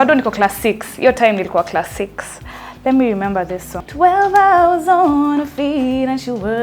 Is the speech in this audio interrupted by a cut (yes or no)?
yes